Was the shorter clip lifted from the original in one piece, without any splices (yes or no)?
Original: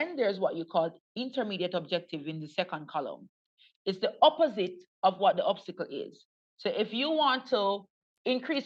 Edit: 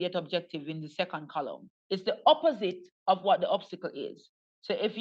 no